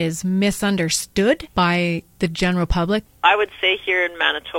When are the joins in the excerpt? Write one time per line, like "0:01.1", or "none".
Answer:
0:01.5
0:03.1